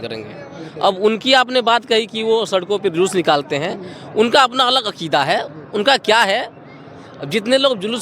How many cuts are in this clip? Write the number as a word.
zero